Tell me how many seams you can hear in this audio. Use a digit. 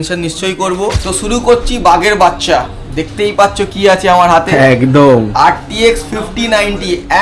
1